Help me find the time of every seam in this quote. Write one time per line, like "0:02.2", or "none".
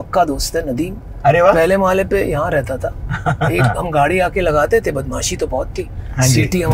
none

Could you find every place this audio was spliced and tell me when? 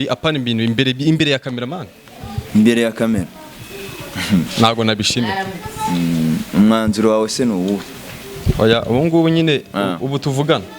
none

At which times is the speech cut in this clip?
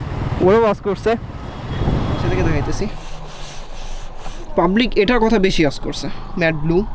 0:02.3

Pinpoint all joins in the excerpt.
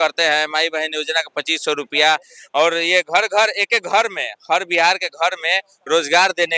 none

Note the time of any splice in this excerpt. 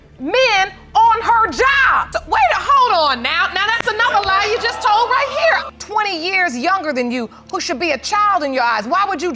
0:02.1
0:05.7

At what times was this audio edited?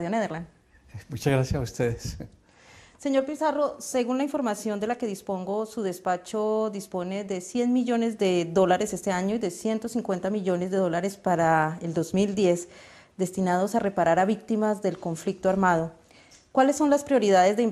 0:11.2

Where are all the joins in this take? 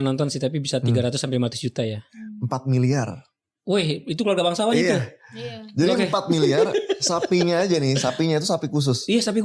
none

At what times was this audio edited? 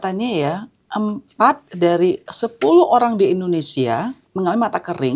0:04.2

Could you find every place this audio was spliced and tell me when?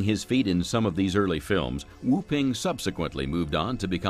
0:01.7

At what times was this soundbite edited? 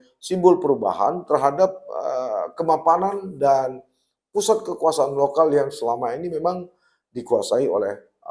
none

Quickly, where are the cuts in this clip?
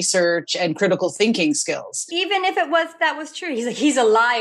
0:02.1

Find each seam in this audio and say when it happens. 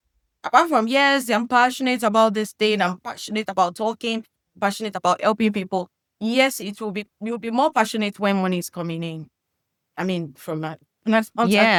none

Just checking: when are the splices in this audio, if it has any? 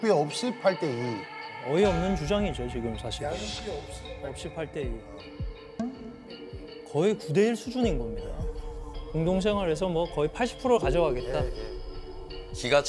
none

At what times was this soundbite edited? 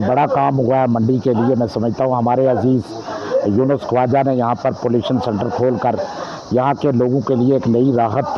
none

